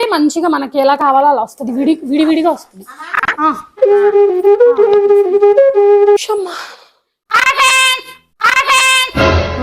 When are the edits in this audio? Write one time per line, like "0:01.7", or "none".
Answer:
0:06.2